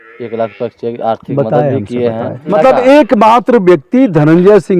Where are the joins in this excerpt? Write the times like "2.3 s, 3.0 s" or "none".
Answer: 2.5 s

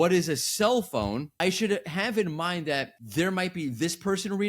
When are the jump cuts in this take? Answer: 1.3 s

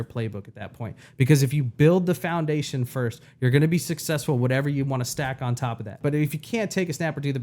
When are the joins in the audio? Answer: 6.0 s

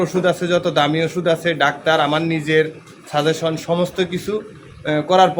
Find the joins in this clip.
none

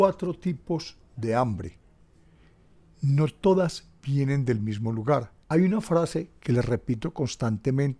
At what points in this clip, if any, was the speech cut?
5.3 s

